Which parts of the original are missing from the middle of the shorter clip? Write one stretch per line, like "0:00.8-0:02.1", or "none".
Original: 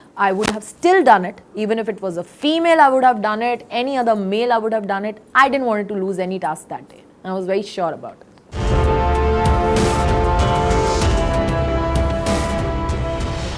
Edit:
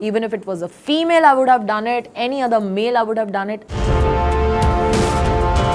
0:05.2-0:08.4